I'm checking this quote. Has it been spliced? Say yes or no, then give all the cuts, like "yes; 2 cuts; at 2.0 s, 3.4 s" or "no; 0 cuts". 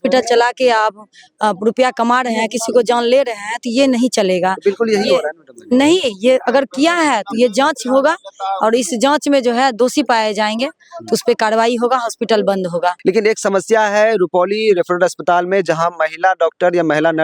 no; 0 cuts